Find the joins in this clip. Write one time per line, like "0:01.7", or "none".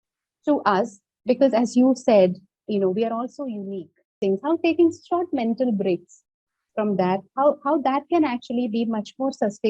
0:04.2